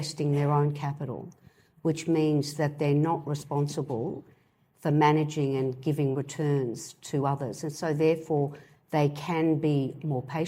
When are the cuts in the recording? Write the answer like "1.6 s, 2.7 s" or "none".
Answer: none